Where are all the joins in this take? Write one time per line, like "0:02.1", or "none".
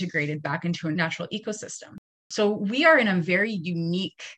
0:01.0
0:02.2